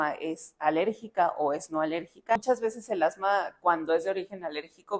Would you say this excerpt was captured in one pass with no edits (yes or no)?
no